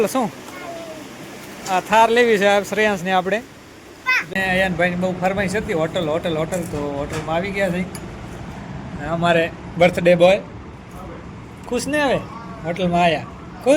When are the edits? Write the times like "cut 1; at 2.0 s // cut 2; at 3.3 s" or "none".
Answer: cut 1; at 4.3 s // cut 2; at 8.5 s